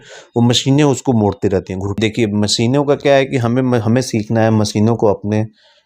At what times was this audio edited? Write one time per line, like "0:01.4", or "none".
0:02.0